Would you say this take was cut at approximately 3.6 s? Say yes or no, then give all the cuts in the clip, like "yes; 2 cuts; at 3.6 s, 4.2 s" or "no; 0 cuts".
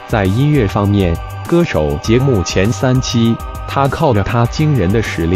yes; 1 cut; at 3.6 s